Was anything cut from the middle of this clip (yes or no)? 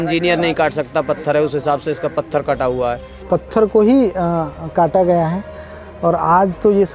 yes